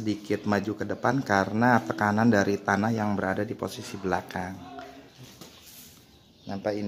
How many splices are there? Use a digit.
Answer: 1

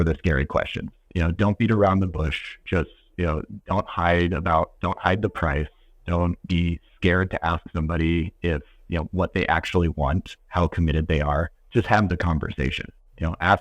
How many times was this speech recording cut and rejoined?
2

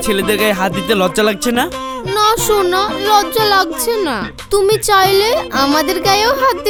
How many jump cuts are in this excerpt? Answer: 0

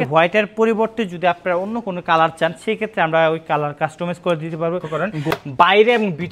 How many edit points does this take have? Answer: 1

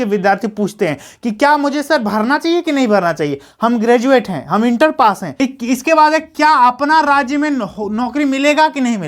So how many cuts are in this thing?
1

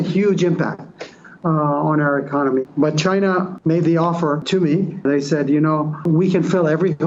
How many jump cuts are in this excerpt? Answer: 4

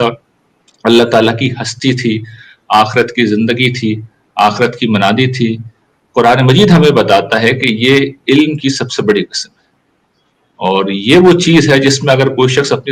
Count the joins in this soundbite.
0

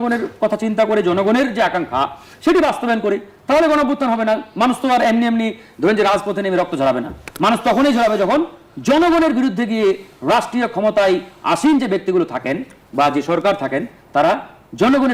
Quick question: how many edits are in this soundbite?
0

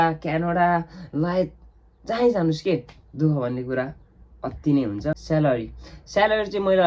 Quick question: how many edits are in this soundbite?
1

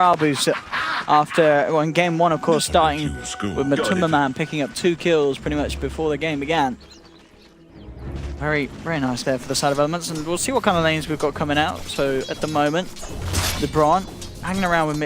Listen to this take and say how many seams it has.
1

